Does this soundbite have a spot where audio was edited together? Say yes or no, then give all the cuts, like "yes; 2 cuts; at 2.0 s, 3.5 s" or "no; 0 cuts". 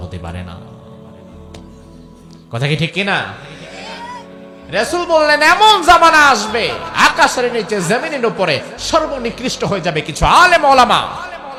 no; 0 cuts